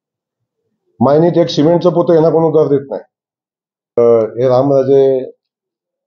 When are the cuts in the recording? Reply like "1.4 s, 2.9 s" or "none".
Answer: 4.0 s